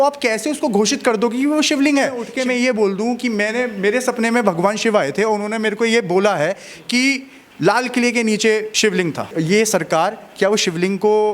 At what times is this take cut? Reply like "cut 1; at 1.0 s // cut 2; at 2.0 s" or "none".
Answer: cut 1; at 2.3 s // cut 2; at 9.3 s